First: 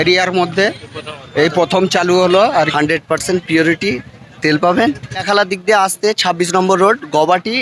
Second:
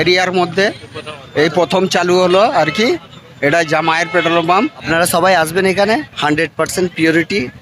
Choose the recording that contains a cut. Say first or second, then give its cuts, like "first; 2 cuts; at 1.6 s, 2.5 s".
first; 2 cuts; at 2.7 s, 5.2 s